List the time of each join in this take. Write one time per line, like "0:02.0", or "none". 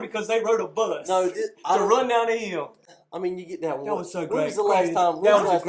none